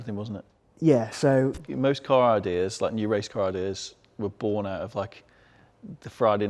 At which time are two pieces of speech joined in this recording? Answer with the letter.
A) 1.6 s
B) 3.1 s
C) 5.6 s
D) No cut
A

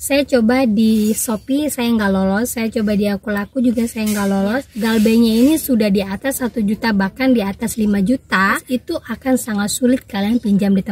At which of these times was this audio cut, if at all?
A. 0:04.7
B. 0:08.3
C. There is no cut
A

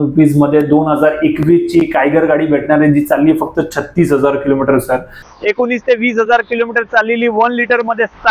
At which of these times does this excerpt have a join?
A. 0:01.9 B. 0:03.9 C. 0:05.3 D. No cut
C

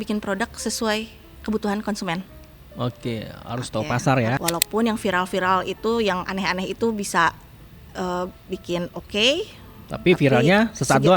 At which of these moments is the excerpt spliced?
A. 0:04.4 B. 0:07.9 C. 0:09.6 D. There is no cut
A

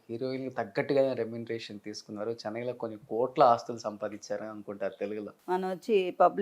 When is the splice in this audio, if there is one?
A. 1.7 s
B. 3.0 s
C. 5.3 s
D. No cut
C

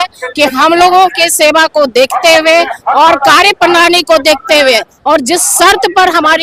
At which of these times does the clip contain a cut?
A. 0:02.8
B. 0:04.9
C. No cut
C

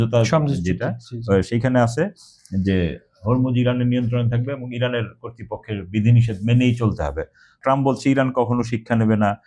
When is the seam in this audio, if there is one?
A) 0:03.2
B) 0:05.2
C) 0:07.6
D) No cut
C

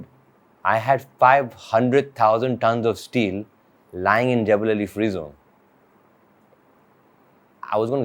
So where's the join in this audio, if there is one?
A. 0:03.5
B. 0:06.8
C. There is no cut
C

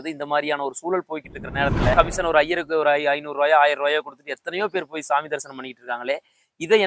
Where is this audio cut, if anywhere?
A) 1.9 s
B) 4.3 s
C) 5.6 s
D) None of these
A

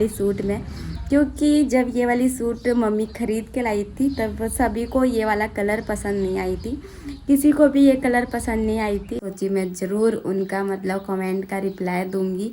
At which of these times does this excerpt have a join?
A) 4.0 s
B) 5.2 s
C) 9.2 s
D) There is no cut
C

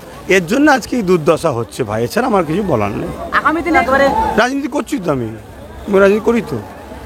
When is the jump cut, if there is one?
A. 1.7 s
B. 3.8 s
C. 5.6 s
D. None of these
B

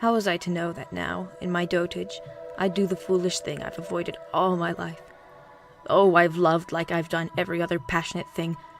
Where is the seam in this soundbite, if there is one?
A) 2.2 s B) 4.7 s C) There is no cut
A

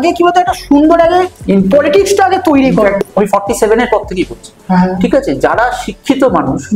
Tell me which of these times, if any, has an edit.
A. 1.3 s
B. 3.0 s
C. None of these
B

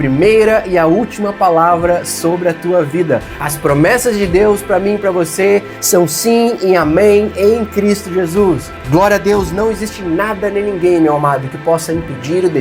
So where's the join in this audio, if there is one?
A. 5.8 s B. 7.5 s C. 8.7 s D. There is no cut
C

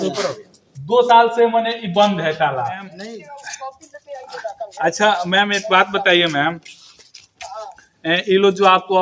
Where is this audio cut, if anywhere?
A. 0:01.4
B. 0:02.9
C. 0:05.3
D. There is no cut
B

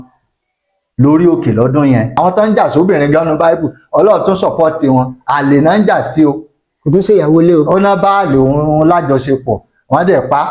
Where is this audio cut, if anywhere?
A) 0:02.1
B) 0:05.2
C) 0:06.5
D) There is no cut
A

